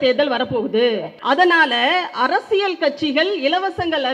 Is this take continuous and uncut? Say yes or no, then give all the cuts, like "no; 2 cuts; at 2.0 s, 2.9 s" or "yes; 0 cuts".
no; 1 cut; at 1.1 s